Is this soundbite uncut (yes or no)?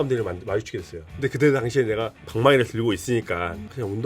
no